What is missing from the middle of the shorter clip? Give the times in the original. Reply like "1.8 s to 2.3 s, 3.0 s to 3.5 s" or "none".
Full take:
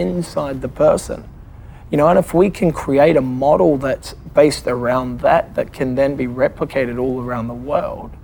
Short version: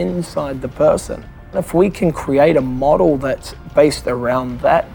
1.6 s to 2.2 s